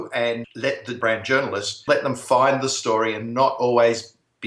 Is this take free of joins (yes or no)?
no